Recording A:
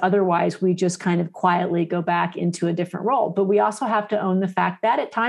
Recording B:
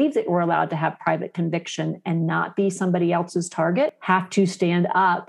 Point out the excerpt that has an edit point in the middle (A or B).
B